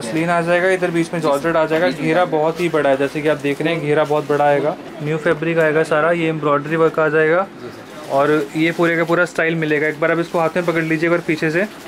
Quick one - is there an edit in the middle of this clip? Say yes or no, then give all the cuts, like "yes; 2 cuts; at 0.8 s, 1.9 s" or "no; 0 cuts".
yes; 1 cut; at 4.9 s